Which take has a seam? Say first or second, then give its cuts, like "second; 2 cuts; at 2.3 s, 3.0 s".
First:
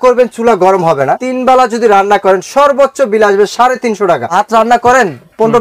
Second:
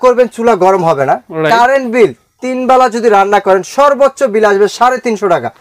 first; 2 cuts; at 1.2 s, 4.3 s